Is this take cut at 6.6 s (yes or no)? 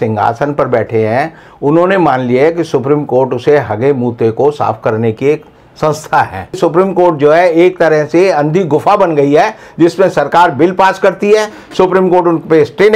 yes